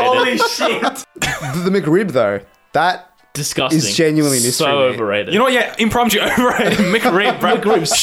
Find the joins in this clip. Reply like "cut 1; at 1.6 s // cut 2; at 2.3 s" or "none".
cut 1; at 1.0 s